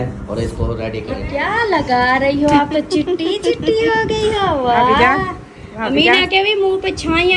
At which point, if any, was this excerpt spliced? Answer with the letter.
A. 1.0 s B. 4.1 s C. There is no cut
A